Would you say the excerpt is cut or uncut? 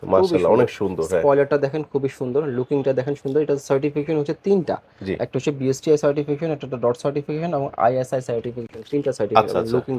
uncut